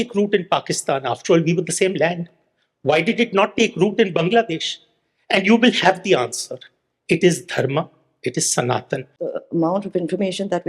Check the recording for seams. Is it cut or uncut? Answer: cut